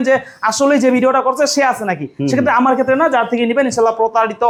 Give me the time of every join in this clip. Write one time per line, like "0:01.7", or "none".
none